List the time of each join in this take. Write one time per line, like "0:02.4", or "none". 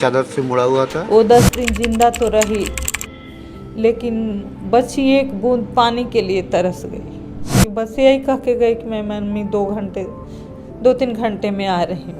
0:01.0
0:07.6